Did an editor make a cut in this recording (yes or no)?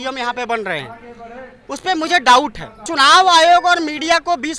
yes